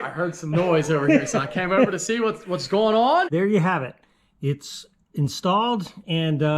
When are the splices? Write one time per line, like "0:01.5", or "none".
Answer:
0:03.3